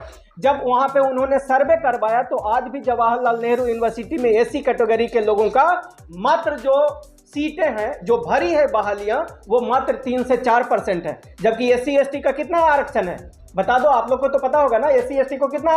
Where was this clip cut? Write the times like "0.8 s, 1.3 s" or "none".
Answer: none